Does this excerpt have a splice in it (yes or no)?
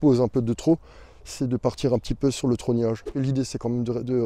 yes